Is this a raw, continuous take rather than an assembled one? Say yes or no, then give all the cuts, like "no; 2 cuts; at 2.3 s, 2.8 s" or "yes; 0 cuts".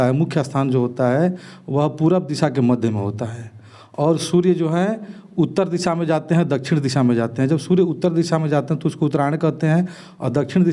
yes; 0 cuts